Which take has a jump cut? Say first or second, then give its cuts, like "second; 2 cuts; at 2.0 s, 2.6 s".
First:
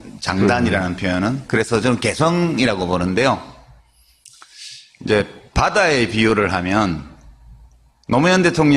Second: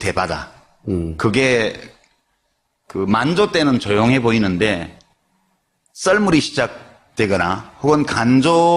second; 1 cut; at 7.6 s